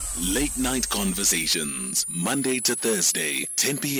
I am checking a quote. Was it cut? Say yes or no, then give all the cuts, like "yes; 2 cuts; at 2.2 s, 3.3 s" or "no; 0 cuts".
no; 0 cuts